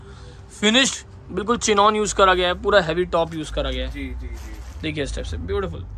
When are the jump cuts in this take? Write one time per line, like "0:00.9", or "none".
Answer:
none